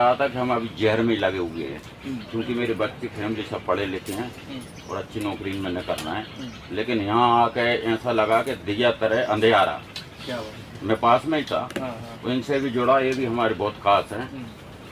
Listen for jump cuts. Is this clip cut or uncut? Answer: uncut